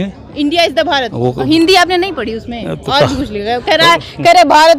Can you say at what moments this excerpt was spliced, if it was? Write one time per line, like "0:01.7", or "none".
none